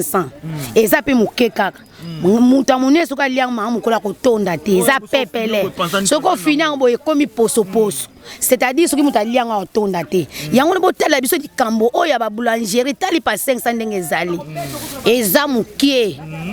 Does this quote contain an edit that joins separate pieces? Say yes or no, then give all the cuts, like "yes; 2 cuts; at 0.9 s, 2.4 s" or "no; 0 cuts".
no; 0 cuts